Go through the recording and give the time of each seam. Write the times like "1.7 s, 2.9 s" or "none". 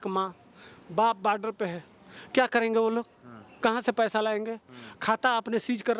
none